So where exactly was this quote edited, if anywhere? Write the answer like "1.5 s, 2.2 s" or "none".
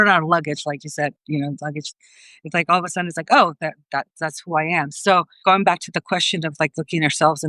5.4 s